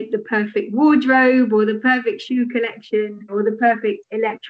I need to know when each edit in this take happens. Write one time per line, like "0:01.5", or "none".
0:03.3